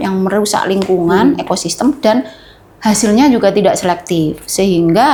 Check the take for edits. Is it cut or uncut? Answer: uncut